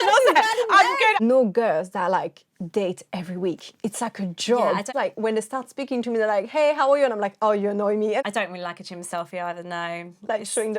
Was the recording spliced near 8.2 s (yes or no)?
yes